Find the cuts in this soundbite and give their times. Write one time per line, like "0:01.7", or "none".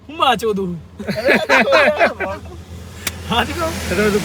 none